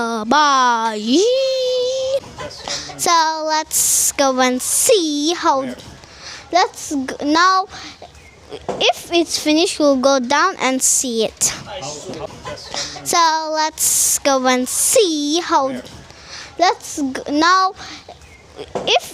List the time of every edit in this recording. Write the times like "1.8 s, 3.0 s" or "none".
2.3 s, 12.3 s